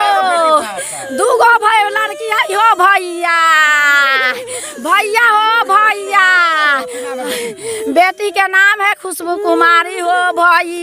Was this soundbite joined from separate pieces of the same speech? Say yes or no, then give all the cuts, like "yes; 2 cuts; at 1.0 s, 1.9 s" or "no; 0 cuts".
no; 0 cuts